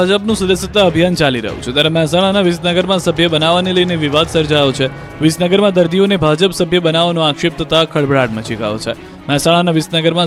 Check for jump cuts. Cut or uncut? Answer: uncut